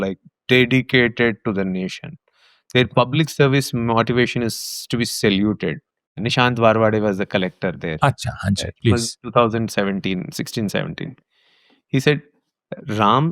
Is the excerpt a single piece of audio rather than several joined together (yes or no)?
no